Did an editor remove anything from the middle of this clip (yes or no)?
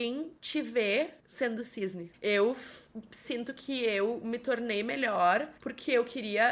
yes